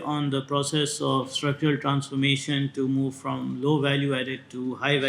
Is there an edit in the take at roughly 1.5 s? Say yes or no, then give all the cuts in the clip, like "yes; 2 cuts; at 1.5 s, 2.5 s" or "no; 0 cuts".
no; 0 cuts